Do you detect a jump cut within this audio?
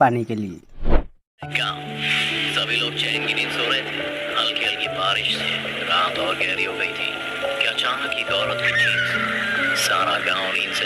yes; 1 cut; at 1.3 s

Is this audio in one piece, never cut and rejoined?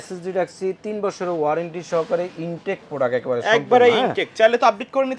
yes; 0 cuts

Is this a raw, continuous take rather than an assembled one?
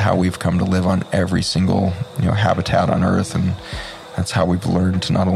yes; 0 cuts

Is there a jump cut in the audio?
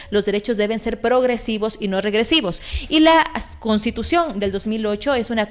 no; 0 cuts

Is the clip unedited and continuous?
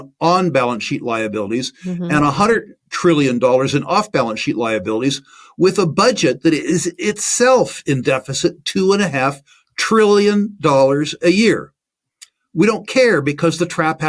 yes; 0 cuts

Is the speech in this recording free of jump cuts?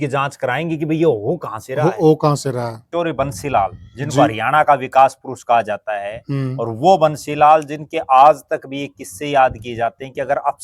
no; 1 cut; at 2.8 s

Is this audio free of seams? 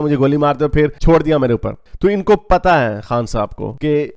yes; 0 cuts

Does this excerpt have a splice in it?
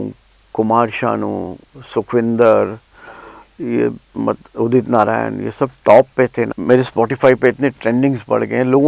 yes; 1 cut; at 6.5 s

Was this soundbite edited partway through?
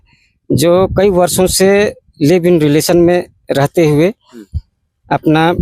no; 0 cuts

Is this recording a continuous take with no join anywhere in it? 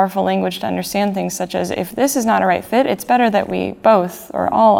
yes; 0 cuts

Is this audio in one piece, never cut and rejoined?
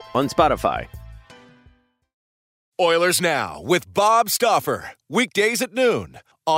no; 1 cut; at 2.6 s

